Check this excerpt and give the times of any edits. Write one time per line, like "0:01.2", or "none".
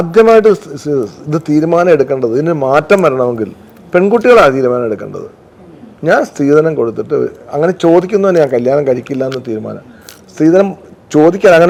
none

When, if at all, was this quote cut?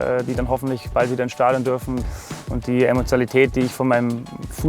0:02.0

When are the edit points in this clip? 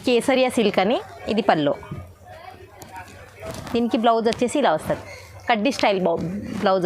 0:01.0

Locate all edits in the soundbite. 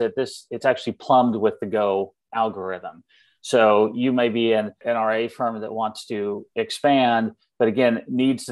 0:04.8

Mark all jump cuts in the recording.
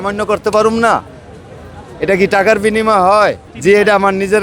none

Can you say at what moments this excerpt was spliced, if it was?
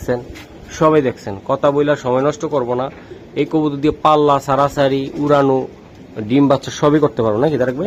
none

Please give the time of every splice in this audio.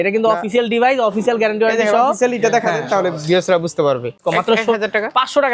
0:04.2

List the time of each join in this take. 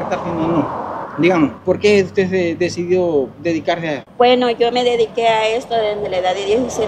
0:01.0
0:01.6
0:04.0

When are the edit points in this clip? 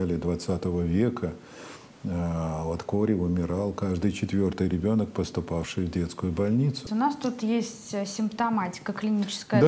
0:06.8

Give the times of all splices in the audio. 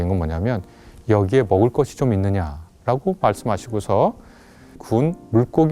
0:04.8

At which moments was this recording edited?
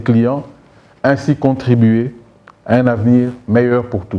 none

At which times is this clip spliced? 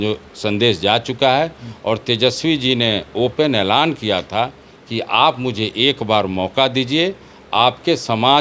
none

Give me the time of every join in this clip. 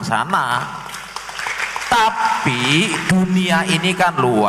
none

